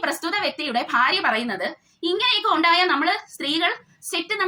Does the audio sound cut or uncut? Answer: uncut